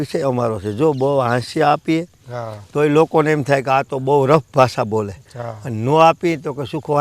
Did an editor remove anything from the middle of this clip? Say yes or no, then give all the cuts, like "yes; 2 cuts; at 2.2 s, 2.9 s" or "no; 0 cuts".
no; 0 cuts